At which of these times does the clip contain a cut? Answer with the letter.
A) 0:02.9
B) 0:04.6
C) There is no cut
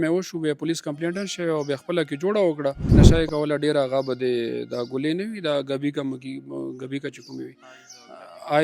A